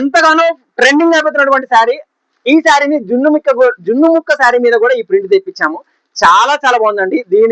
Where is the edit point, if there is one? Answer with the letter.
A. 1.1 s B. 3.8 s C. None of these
C